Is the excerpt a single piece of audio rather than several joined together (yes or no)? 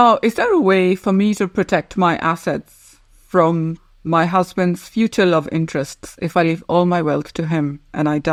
yes